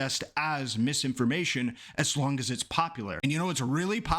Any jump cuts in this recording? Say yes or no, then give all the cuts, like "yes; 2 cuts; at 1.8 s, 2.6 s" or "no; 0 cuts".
yes; 1 cut; at 3.1 s